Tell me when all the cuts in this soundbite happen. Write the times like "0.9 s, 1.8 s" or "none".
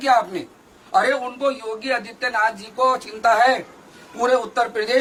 none